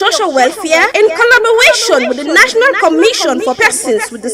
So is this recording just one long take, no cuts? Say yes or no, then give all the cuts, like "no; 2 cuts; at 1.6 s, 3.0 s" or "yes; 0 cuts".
yes; 0 cuts